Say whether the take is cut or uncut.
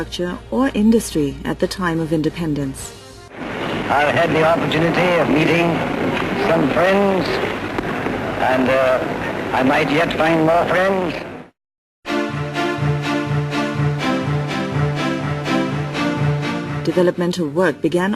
cut